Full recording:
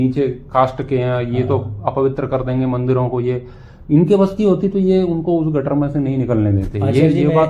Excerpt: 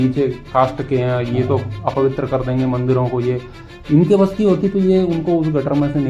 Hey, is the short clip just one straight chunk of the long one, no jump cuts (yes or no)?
yes